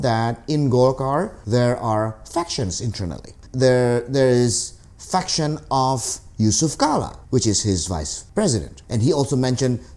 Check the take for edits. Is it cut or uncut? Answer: cut